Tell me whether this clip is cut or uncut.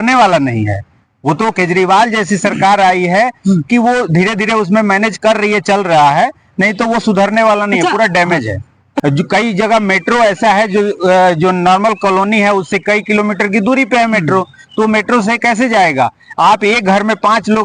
cut